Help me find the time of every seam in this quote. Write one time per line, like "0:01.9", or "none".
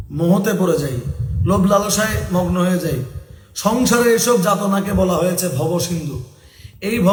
none